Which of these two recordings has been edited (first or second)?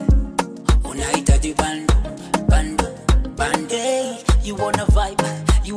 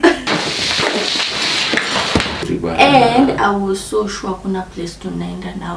second